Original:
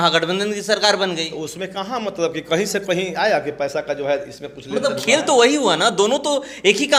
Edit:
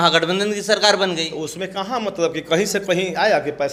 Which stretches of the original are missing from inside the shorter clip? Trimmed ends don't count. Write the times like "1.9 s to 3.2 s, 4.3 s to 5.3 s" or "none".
none